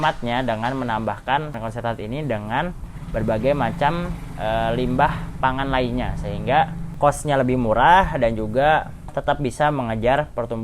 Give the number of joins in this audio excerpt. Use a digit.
1